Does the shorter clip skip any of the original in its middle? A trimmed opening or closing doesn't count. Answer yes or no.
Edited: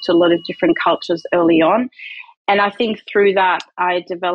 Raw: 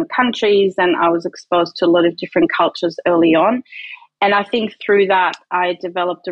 no